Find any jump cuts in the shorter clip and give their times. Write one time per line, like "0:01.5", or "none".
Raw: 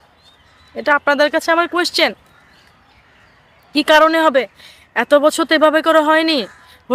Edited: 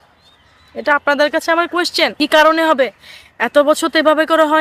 0:02.1